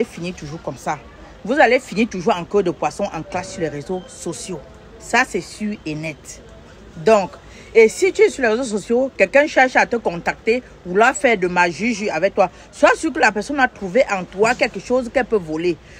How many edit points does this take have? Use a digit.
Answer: 0